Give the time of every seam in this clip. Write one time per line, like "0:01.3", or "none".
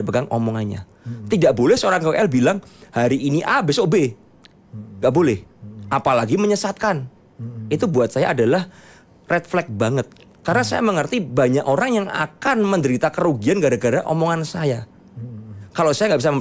none